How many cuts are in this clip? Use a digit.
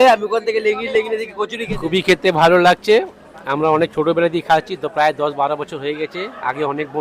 1